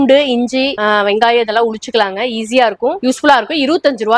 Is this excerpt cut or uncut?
cut